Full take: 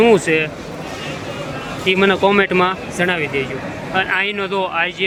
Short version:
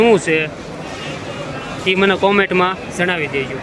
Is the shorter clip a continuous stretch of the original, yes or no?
yes